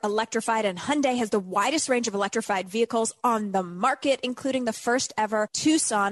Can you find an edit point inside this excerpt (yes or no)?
no